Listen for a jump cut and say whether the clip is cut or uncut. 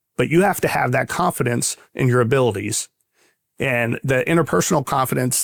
uncut